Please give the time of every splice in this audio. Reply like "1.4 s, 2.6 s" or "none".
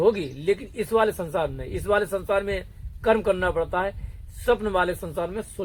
none